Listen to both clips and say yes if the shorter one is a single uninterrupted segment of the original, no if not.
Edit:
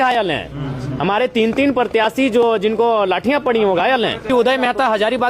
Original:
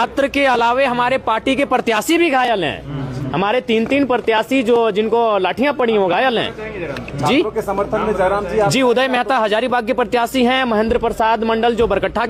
no